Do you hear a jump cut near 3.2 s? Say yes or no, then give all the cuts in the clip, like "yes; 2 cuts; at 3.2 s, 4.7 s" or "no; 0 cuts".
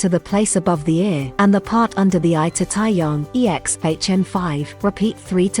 yes; 3 cuts; at 1.3 s, 3.2 s, 4.7 s